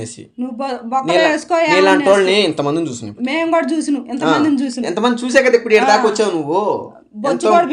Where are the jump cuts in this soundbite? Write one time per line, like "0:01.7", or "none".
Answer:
none